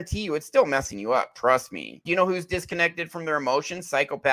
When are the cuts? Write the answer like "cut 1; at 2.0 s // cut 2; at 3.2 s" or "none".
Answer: cut 1; at 2.0 s